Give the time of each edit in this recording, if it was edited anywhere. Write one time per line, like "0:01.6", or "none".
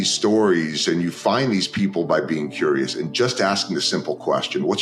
none